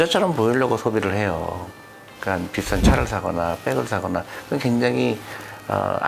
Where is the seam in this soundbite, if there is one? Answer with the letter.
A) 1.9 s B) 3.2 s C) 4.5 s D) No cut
D